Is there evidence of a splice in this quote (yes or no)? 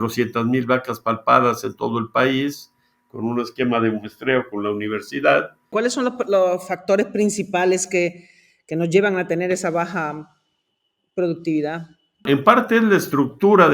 yes